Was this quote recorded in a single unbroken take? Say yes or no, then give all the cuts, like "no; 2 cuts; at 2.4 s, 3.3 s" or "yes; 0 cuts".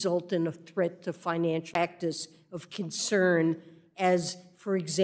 yes; 0 cuts